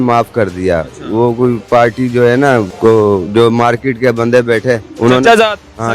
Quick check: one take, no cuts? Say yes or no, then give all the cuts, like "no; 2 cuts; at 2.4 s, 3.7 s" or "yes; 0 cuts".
no; 2 cuts; at 2.7 s, 4.9 s